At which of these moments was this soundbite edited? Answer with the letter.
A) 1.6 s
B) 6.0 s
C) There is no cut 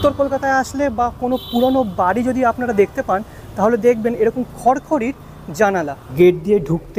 B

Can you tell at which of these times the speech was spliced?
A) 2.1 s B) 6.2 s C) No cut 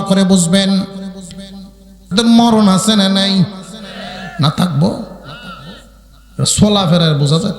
A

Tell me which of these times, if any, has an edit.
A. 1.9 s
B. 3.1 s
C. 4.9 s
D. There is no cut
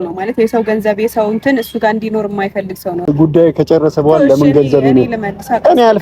B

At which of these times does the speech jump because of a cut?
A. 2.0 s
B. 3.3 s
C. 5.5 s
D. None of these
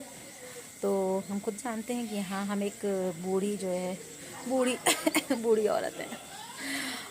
D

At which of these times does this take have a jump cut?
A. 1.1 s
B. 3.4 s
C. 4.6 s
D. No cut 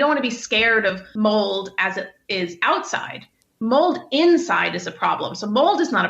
A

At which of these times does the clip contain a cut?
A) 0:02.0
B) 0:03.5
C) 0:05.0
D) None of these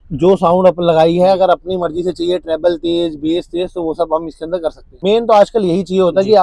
C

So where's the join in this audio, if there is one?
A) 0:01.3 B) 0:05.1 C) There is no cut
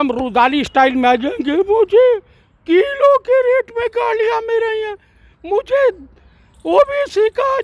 C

